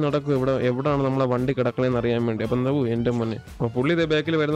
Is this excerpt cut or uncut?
cut